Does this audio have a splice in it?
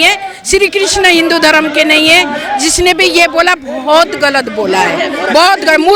no; 0 cuts

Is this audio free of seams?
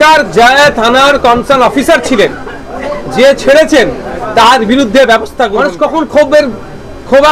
no; 1 cut; at 5.5 s

